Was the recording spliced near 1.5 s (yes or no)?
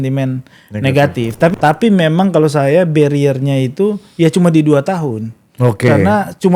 yes